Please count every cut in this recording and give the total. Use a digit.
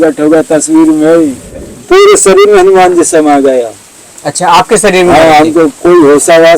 1